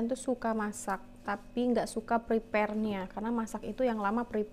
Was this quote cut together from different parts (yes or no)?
no